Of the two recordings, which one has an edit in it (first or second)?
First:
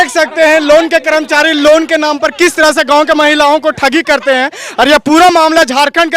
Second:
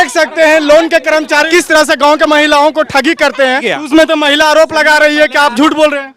second